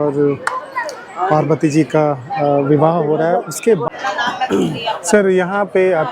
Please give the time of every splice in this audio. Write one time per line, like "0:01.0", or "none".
0:03.9